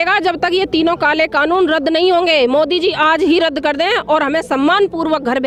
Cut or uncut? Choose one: uncut